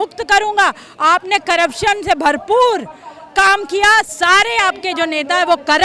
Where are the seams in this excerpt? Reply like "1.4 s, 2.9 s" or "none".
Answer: none